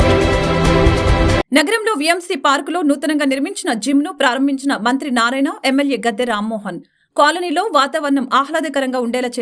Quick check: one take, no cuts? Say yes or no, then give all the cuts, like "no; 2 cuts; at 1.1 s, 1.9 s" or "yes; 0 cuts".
yes; 0 cuts